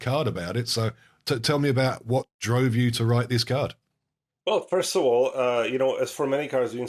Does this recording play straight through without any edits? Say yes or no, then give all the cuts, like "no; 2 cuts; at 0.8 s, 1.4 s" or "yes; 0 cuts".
yes; 0 cuts